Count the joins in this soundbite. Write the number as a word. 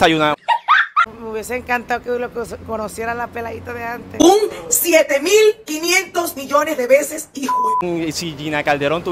two